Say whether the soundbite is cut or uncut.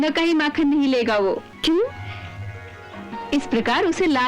cut